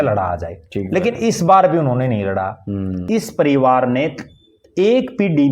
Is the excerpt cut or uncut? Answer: cut